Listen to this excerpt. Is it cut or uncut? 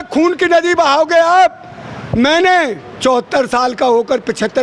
uncut